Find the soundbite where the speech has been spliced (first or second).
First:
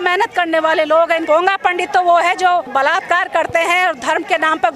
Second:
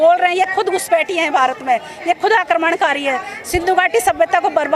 first